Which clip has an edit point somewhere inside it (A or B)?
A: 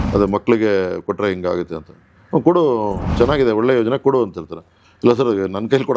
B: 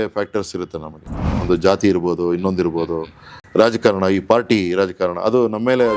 B